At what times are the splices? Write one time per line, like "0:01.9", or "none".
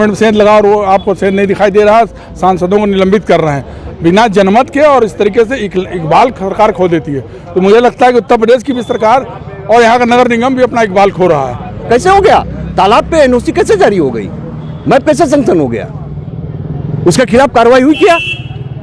0:11.8

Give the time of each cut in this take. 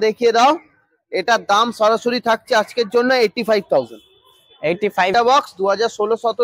0:05.1

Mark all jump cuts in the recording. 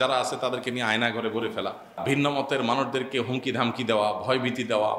0:02.0

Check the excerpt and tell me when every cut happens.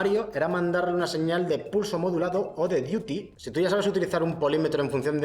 0:03.3

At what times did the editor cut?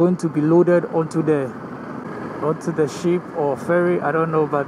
none

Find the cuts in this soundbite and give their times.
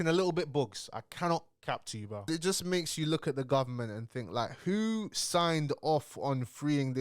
0:02.2

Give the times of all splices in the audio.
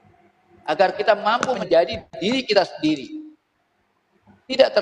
0:01.6

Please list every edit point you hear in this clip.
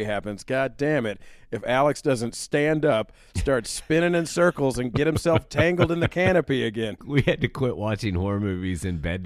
0:07.0

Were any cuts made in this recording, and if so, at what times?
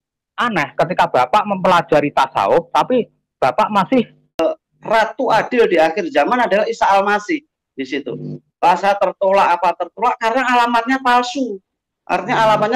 0:04.4
0:08.6

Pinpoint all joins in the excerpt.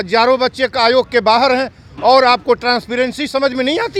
none

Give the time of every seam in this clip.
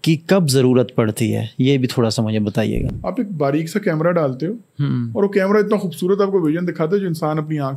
0:02.8

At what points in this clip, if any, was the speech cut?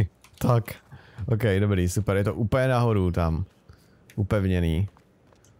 none

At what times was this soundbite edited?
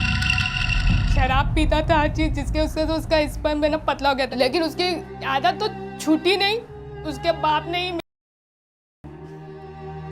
0:01.0

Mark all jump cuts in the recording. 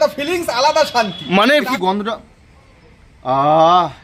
0:01.7

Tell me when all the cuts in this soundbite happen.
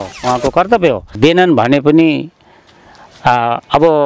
0:01.1

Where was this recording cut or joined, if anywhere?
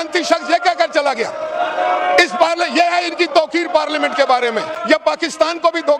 0:04.7

